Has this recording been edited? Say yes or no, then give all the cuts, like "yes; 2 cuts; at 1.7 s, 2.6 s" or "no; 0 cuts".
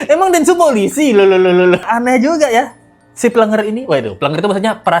yes; 1 cut; at 1.8 s